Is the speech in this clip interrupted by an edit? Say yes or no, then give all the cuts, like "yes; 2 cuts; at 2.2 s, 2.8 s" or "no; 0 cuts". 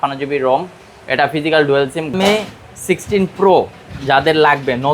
yes; 1 cut; at 2.1 s